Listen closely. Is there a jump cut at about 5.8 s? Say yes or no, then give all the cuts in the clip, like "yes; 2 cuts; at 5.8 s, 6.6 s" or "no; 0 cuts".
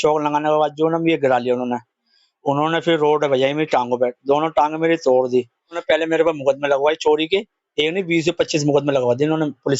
yes; 1 cut; at 5.8 s